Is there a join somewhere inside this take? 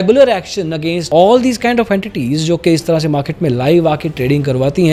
no; 0 cuts

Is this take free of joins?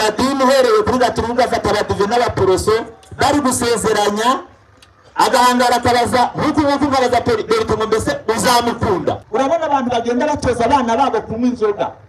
no; 1 cut; at 9.2 s

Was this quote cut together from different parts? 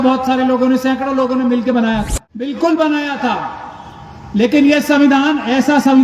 yes; 1 cut; at 2.5 s

